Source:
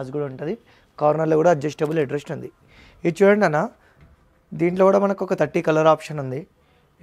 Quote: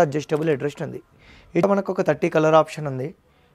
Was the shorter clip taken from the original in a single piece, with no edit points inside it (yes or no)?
no